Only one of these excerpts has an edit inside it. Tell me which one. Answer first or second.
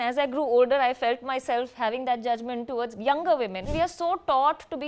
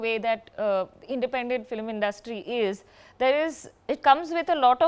first